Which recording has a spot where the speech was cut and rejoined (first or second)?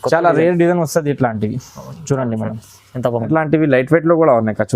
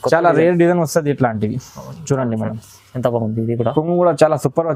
first